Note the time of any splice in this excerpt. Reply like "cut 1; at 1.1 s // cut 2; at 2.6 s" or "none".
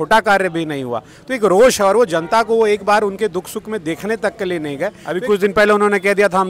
cut 1; at 5.0 s